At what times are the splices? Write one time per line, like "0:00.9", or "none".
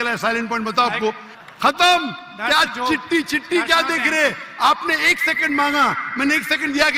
0:01.3